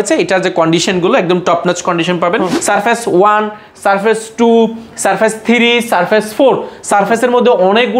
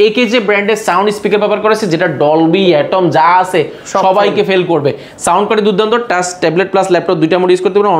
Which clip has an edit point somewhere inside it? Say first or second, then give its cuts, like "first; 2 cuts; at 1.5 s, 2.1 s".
first; 1 cut; at 2.6 s